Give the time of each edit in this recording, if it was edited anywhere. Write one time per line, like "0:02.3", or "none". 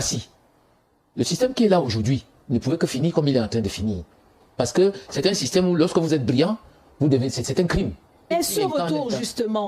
0:08.3